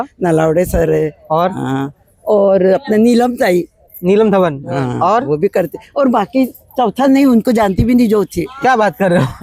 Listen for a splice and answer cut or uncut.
uncut